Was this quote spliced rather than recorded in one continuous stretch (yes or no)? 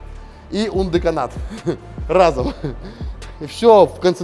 no